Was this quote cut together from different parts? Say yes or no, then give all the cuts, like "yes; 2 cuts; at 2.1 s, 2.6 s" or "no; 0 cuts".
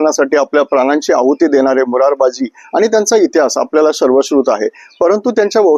no; 0 cuts